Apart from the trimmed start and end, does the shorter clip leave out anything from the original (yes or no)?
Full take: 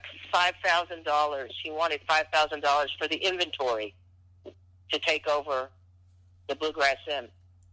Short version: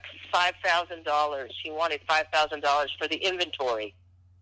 no